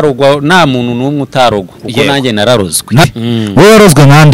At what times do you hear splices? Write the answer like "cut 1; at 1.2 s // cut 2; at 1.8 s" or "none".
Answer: cut 1; at 3.0 s